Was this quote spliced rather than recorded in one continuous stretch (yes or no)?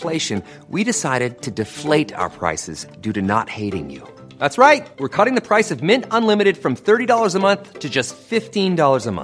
no